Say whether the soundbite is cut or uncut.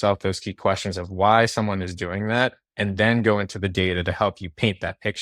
uncut